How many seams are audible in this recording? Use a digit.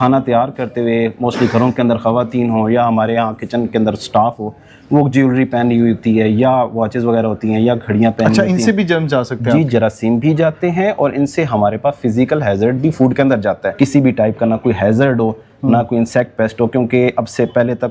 1